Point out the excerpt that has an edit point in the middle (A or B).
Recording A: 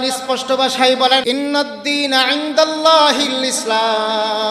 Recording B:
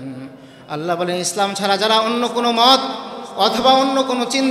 A